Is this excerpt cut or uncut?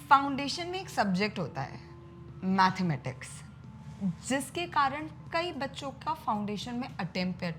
uncut